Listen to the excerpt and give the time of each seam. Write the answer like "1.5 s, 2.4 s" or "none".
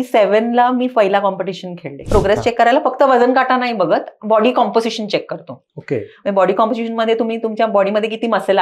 2.0 s